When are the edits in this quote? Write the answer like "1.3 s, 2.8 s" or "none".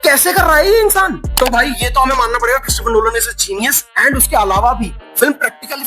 none

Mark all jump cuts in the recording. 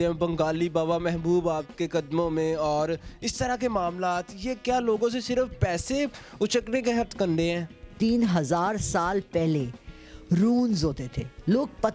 7.9 s

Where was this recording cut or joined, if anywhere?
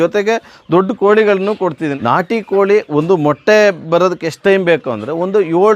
1.9 s

